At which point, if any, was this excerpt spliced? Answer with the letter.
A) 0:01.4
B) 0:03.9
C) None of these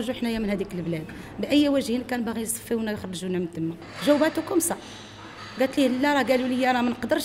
B